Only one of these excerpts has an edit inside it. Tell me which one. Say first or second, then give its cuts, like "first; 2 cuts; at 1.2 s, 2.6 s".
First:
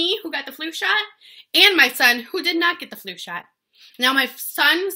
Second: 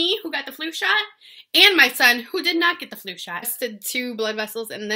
second; 1 cut; at 3.5 s